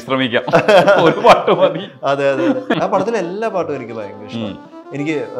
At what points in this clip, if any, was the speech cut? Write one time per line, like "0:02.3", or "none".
0:02.7